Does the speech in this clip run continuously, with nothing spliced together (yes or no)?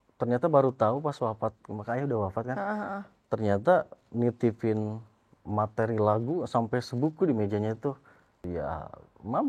no